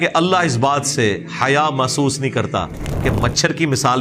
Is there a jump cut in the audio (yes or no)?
no